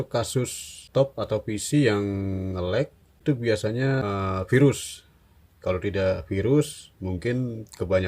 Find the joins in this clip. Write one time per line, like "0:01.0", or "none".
0:00.8
0:03.2
0:04.0